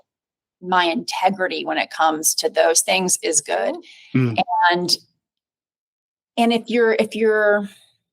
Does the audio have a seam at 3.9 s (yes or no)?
yes